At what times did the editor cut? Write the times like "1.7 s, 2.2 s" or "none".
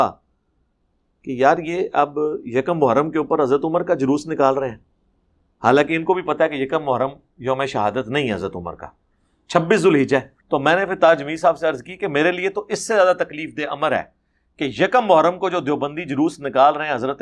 10.4 s

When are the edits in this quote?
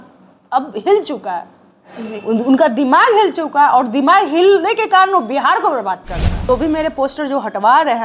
6.4 s

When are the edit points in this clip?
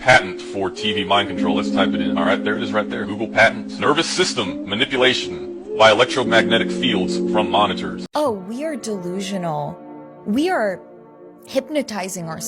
8.0 s

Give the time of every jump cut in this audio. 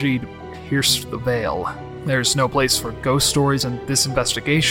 1.9 s, 3.6 s

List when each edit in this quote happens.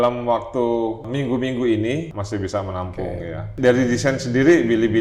1.0 s, 2.2 s, 3.5 s

